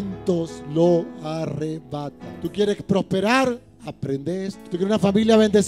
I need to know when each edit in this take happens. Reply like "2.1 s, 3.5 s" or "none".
2.2 s, 4.6 s